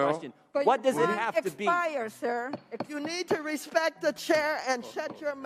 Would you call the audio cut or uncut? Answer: uncut